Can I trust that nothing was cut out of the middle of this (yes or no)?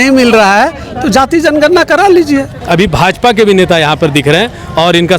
no